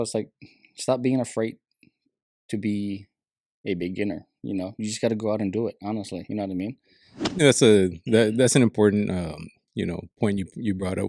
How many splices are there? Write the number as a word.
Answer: one